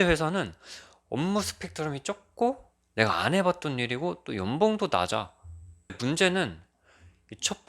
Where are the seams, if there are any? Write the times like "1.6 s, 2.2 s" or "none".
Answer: 6.0 s